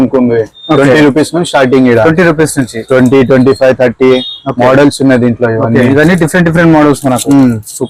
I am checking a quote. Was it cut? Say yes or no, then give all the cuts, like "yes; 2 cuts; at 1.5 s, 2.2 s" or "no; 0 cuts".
no; 0 cuts